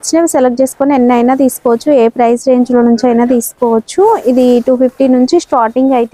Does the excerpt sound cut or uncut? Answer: uncut